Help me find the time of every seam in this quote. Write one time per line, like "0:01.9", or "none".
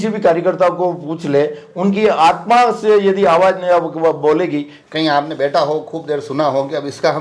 0:04.8